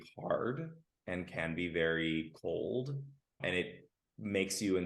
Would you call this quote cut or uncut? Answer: cut